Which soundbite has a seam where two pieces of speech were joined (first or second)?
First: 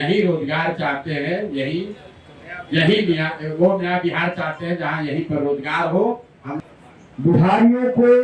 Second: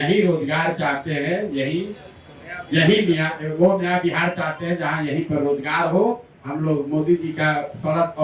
first